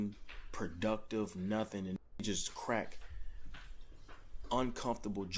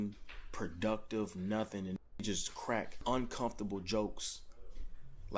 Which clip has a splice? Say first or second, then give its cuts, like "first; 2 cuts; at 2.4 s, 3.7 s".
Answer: second; 1 cut; at 2.9 s